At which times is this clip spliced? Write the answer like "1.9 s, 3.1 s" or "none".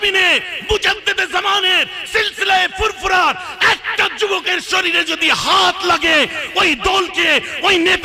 none